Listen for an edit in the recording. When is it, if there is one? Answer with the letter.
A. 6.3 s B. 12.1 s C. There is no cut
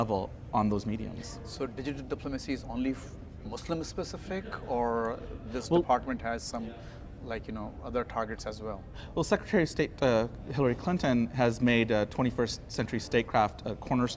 B